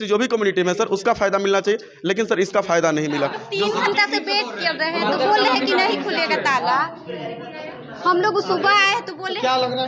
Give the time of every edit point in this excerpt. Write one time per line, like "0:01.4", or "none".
0:03.4